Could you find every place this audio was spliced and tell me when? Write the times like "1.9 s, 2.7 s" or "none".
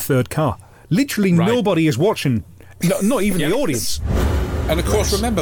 4.2 s

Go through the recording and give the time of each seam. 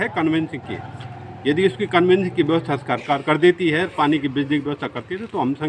none

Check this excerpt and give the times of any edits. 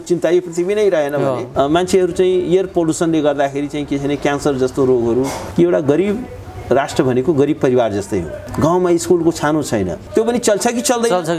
1.4 s, 5.4 s, 8.4 s, 10.0 s

